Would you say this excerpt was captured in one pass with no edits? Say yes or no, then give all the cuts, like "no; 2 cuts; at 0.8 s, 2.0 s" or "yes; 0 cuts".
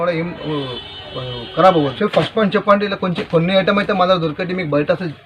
no; 1 cut; at 1.9 s